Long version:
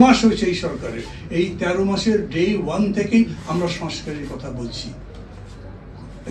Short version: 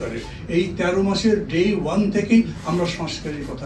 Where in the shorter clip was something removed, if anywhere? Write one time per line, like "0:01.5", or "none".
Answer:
none